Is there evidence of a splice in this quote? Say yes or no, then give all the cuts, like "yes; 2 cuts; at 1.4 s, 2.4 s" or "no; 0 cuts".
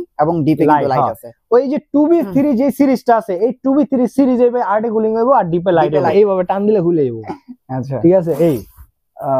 yes; 1 cut; at 6.1 s